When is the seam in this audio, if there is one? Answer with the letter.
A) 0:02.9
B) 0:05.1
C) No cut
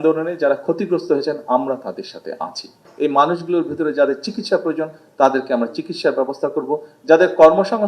A